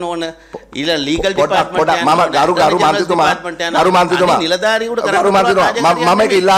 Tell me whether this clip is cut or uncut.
uncut